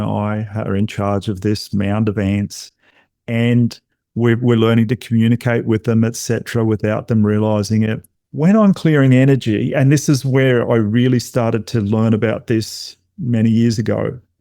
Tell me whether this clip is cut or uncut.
cut